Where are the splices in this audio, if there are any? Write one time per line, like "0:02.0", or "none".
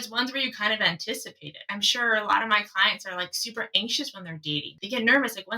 0:01.6
0:04.7